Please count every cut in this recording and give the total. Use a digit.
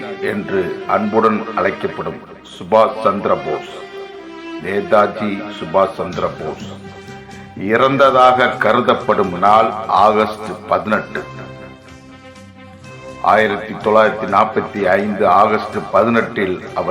2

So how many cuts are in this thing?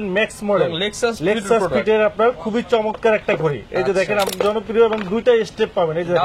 1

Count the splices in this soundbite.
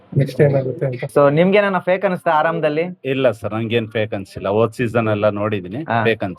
1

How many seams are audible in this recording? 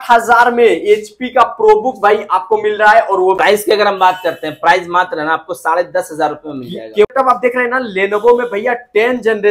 2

